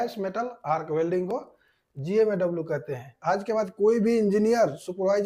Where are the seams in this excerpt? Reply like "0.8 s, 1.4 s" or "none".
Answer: 3.1 s